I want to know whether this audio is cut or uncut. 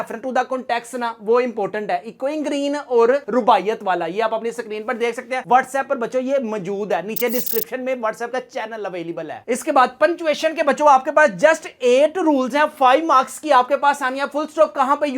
uncut